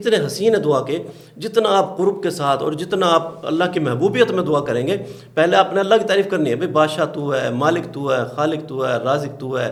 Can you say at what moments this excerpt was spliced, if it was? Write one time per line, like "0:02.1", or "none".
none